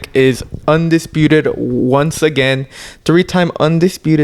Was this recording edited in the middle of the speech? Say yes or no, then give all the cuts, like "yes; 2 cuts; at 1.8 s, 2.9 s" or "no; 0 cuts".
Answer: no; 0 cuts